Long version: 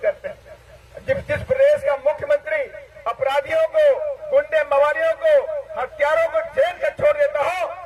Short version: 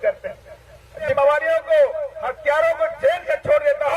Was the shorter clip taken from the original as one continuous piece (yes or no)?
no